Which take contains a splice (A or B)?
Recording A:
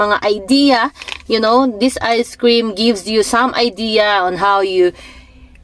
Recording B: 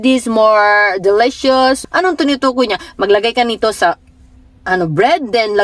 B